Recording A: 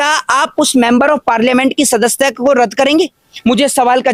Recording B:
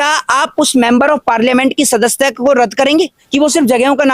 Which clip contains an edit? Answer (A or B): B